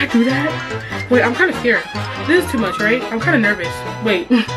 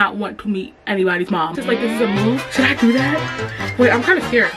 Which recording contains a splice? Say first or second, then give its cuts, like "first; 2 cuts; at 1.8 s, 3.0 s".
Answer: second; 1 cut; at 1.5 s